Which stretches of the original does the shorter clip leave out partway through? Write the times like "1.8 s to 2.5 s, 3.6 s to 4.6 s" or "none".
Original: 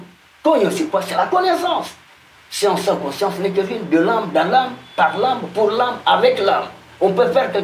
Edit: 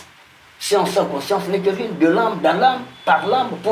none